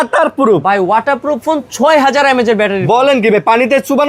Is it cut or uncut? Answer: uncut